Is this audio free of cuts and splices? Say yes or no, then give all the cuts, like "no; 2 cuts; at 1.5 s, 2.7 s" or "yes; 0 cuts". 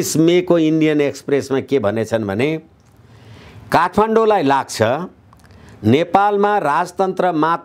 yes; 0 cuts